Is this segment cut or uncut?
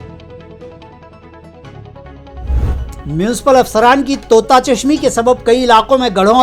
uncut